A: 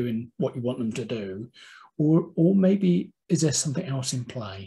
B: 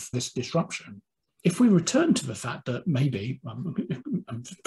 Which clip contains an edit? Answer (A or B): B